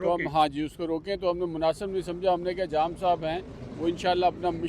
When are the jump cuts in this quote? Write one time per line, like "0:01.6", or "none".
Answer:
none